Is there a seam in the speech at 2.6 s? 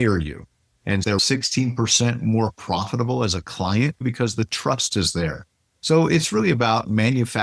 no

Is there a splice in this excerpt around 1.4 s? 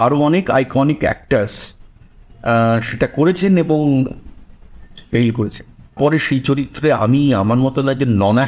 no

